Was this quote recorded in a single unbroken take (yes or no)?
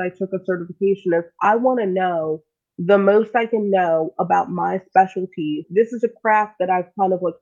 no